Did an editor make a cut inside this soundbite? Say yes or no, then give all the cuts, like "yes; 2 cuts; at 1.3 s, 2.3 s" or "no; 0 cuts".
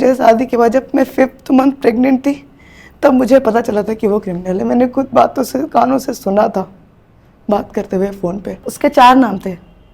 yes; 1 cut; at 8.7 s